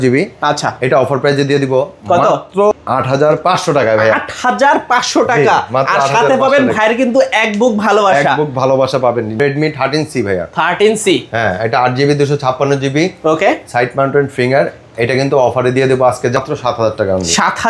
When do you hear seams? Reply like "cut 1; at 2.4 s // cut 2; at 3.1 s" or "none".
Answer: cut 1; at 2.7 s // cut 2; at 9.4 s // cut 3; at 16.4 s

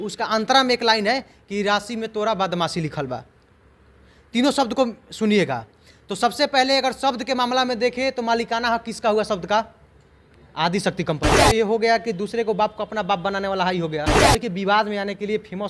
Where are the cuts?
cut 1; at 11.3 s // cut 2; at 14.1 s

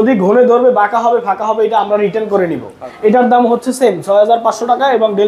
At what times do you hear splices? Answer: cut 1; at 2.8 s

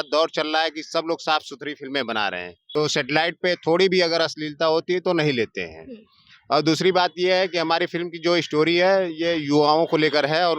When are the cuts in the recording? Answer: cut 1; at 2.5 s

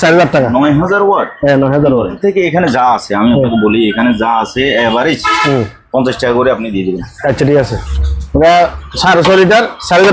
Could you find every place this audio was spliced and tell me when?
cut 1; at 2.2 s // cut 2; at 7.8 s

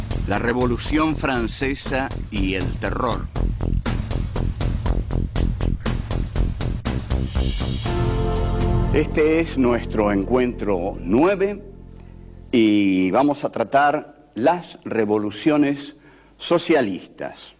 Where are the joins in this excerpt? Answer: cut 1; at 14.8 s

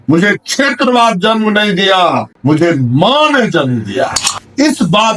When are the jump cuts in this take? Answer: cut 1; at 4.2 s

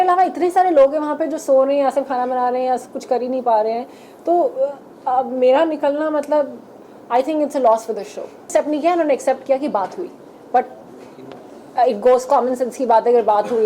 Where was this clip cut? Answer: cut 1; at 8.5 s

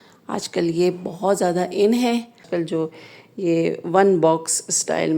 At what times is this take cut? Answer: cut 1; at 2.8 s

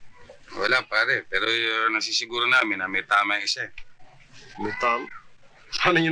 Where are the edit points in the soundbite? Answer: none

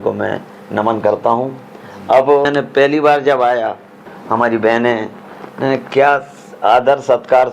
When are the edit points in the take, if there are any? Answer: cut 1; at 2.5 s // cut 2; at 4.1 s

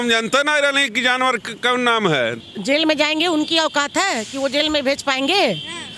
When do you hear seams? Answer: cut 1; at 2.5 s

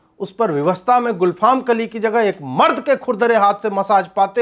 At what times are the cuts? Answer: none

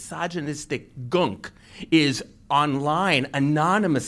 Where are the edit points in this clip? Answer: none

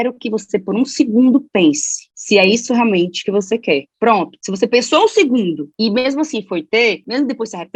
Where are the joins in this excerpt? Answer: none

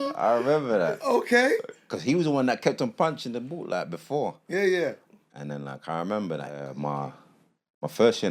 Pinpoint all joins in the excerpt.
cut 1; at 6.7 s

